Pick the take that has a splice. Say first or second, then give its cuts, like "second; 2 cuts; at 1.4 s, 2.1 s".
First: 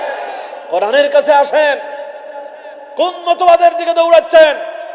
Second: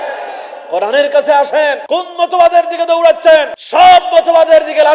second; 2 cuts; at 1.8 s, 3.6 s